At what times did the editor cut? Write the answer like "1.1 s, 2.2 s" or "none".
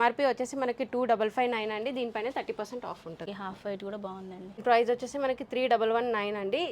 3.2 s, 4.6 s